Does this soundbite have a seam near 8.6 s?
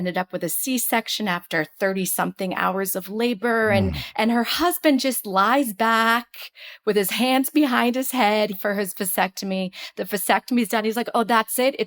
yes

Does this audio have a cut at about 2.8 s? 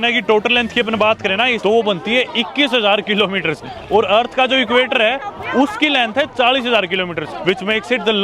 no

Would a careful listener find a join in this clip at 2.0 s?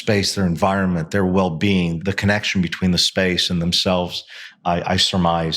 yes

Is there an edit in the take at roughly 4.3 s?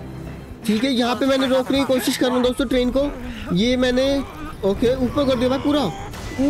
no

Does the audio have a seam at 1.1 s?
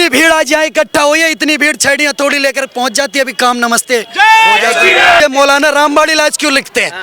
no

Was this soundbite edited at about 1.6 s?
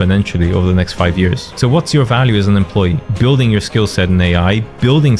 yes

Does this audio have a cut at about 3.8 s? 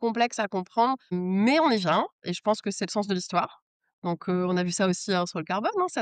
no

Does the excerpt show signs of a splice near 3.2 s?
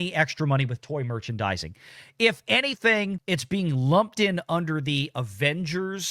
yes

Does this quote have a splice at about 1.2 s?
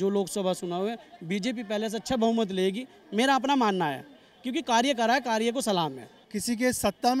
no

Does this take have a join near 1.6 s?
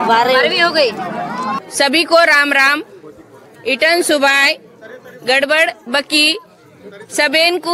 yes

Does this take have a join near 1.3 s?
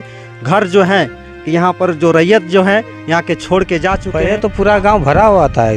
no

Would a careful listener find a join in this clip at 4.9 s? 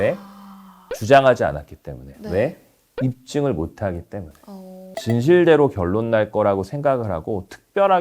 yes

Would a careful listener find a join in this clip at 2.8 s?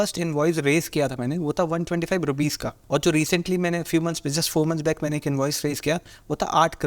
yes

